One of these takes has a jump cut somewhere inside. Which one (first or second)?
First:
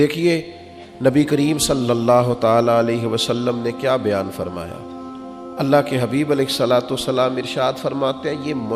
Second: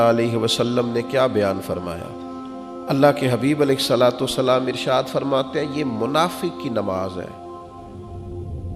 second